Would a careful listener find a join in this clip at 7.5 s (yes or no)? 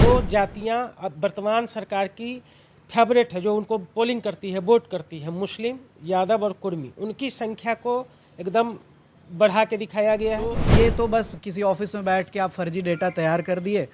no